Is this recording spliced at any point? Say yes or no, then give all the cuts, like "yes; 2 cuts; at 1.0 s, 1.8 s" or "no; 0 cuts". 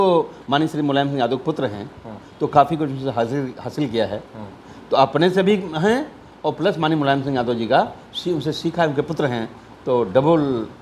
no; 0 cuts